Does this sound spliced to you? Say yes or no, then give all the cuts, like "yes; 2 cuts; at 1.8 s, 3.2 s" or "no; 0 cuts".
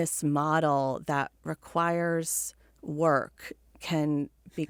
no; 0 cuts